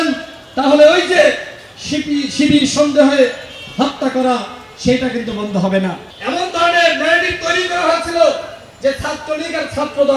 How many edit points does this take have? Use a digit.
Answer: 1